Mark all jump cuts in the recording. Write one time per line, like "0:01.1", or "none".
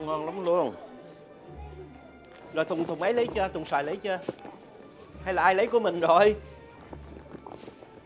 0:02.4

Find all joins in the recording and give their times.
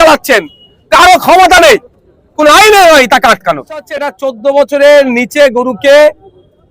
0:04.2

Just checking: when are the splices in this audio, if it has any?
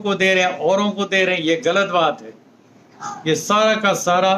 none

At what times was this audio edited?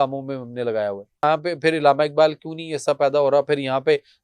0:01.2

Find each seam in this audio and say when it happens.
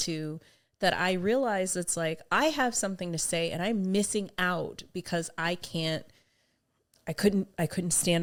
none

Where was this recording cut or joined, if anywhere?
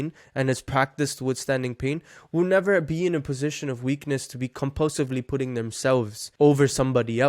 0:06.2

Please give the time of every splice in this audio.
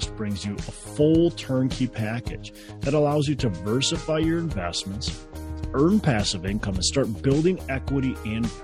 none

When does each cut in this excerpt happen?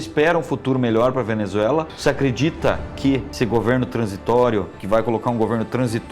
0:01.9
0:03.3
0:04.8

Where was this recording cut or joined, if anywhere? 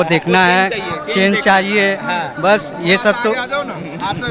none

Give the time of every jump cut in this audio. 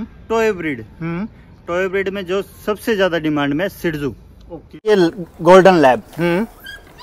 0:04.9

